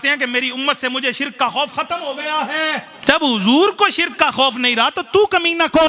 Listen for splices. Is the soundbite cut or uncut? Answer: cut